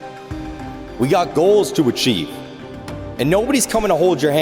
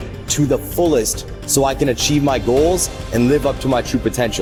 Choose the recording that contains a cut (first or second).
first